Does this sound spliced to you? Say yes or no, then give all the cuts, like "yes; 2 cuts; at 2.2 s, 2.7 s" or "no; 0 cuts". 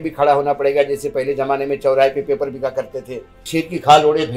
yes; 1 cut; at 3.4 s